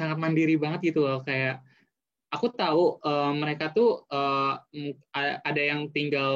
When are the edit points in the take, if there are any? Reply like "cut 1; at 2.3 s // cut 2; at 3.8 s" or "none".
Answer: none